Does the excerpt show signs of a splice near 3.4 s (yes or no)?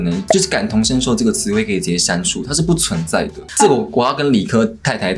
yes